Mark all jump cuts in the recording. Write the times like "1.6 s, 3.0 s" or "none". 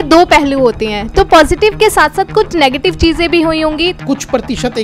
3.9 s